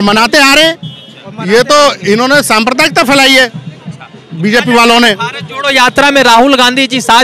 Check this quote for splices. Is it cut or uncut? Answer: uncut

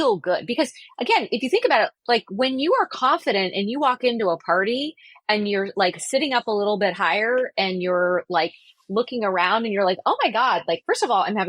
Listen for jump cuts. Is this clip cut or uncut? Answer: uncut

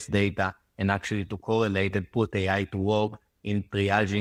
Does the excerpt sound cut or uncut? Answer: uncut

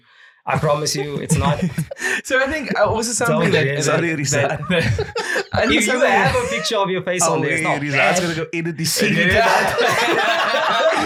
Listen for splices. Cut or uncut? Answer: uncut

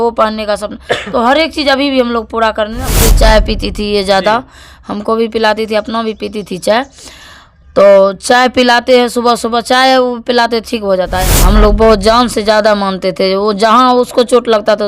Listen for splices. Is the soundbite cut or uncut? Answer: cut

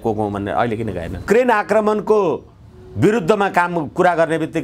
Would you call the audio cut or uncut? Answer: cut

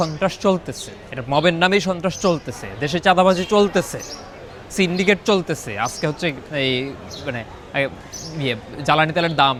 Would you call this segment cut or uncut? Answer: uncut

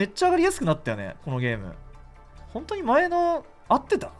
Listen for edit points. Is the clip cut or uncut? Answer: uncut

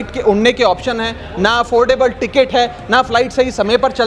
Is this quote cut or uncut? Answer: uncut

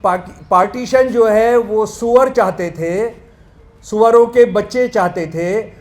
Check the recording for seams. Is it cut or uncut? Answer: uncut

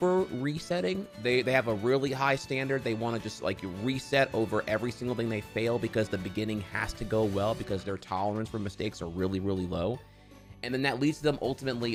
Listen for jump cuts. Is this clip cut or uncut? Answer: uncut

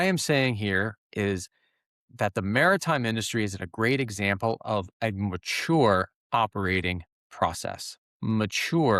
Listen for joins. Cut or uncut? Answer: uncut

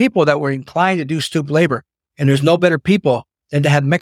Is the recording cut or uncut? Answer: uncut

